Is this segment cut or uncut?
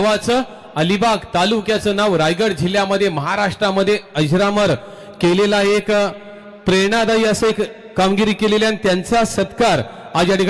uncut